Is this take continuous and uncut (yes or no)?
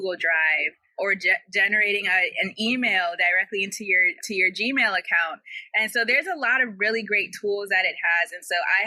yes